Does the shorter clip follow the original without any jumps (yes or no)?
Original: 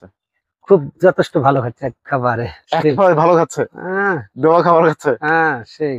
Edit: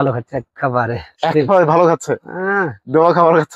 yes